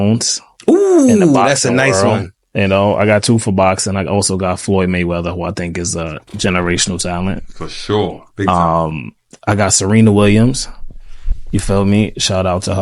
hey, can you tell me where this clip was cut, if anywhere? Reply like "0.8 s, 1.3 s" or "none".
none